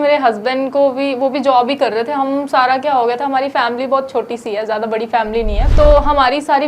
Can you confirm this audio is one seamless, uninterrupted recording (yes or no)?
no